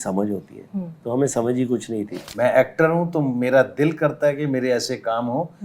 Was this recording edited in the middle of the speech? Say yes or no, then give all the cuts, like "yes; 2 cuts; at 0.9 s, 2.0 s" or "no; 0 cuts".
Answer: yes; 1 cut; at 2.2 s